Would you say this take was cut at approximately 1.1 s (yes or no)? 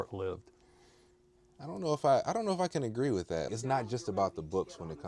no